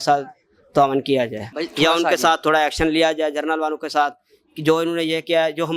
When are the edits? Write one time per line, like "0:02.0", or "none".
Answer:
none